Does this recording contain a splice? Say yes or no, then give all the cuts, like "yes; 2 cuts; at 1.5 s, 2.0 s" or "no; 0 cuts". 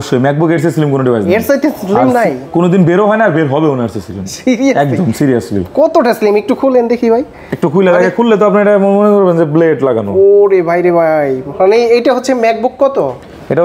no; 0 cuts